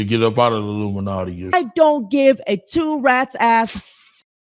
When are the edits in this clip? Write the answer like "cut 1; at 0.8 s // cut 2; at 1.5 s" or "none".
cut 1; at 1.5 s